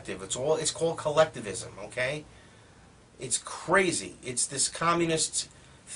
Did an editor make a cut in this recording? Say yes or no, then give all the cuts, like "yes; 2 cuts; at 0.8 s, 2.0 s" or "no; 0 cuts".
no; 0 cuts